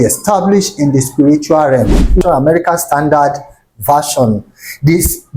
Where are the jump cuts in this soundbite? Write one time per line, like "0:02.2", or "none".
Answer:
0:02.2

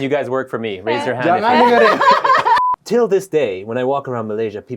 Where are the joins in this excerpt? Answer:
0:02.6

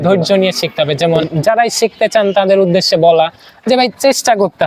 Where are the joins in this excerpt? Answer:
0:01.2

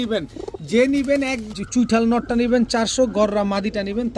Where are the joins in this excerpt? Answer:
0:01.5

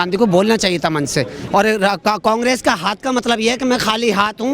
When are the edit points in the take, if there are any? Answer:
0:01.4

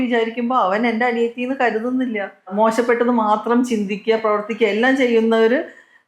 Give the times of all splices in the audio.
0:02.5

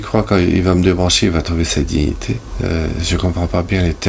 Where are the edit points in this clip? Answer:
0:02.5

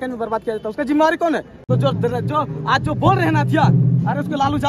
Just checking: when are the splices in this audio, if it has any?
0:01.6

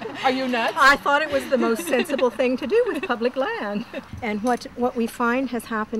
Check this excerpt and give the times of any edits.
0:04.0

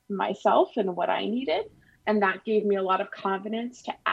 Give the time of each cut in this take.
0:02.0

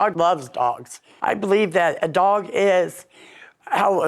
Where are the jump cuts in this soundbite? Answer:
0:01.1

